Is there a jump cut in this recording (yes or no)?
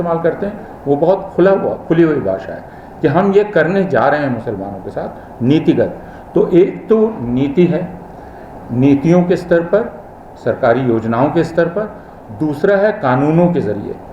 no